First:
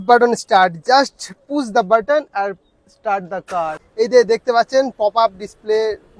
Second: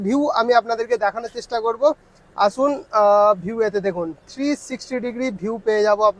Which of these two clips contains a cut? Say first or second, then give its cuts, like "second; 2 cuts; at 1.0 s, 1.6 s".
first; 1 cut; at 3.8 s